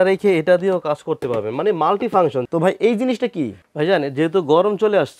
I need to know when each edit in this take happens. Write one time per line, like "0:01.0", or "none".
0:02.5
0:03.6

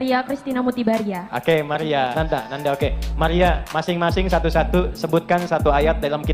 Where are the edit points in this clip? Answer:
0:02.1

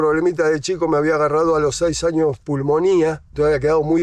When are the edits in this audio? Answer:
none

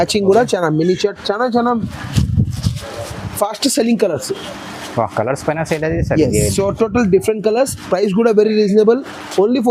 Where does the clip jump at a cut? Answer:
none

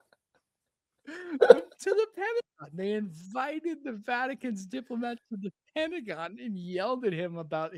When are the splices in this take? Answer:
none

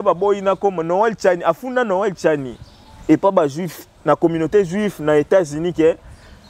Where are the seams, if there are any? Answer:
none

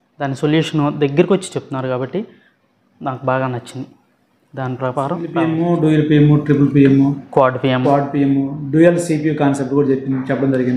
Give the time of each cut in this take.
0:05.3

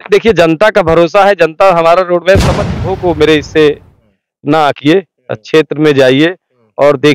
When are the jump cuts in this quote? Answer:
0:02.7

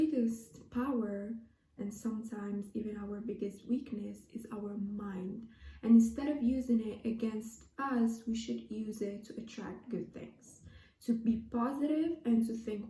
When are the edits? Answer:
none

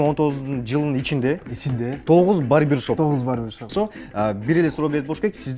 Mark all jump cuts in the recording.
0:03.7

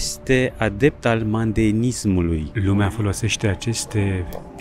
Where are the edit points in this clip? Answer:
0:02.5

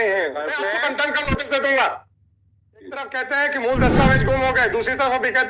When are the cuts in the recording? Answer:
0:01.0
0:03.1

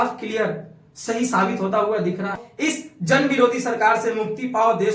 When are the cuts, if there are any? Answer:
0:02.5

